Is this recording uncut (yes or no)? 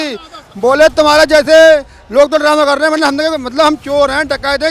yes